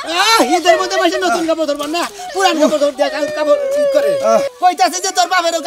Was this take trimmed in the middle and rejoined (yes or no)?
yes